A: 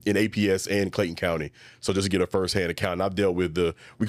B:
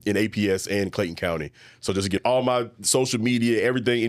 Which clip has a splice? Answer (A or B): B